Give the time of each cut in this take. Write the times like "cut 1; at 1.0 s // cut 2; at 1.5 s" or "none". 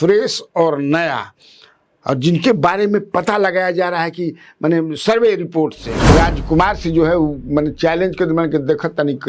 cut 1; at 6.1 s